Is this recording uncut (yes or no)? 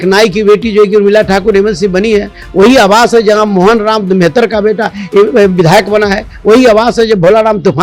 yes